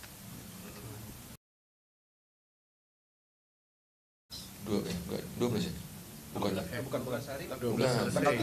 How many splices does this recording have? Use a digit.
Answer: 0